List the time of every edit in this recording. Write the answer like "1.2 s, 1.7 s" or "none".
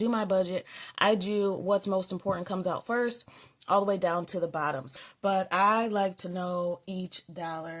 4.9 s